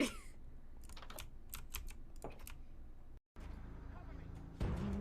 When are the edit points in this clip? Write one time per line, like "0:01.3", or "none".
0:03.3